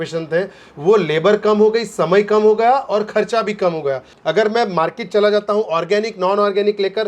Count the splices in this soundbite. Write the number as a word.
one